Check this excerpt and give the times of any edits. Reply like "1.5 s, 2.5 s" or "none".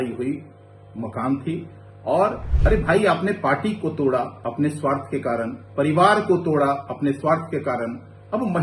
2.5 s